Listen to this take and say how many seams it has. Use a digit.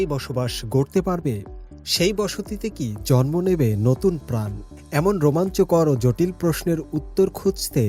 0